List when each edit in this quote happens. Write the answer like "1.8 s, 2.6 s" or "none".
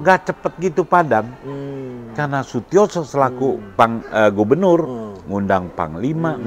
none